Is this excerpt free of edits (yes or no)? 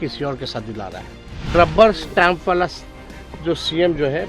no